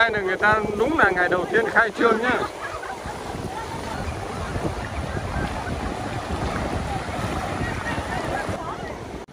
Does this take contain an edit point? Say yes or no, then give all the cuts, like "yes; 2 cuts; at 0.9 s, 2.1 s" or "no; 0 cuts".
no; 0 cuts